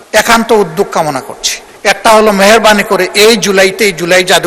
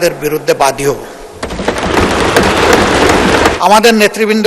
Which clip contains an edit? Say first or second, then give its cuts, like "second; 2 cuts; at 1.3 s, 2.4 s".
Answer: second; 1 cut; at 3.6 s